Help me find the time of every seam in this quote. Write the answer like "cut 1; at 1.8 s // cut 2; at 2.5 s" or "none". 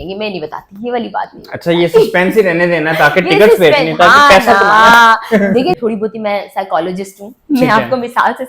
cut 1; at 5.8 s

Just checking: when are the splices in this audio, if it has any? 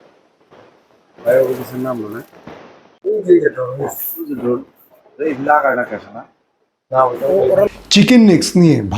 cut 1; at 7.7 s

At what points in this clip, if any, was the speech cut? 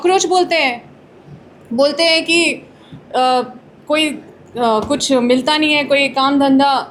none

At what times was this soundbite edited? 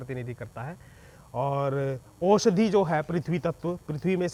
none

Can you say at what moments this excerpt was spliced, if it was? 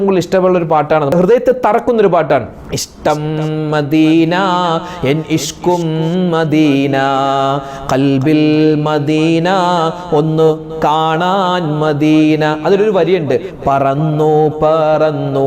cut 1; at 1.1 s

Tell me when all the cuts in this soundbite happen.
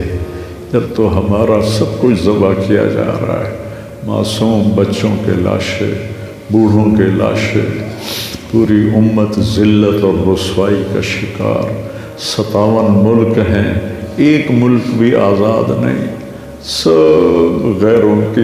none

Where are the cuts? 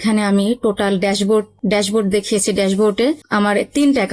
cut 1; at 1.5 s // cut 2; at 3.2 s

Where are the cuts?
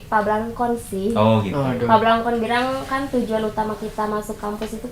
none

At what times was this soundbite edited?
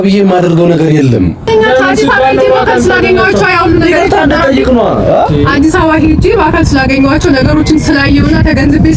cut 1; at 1.5 s

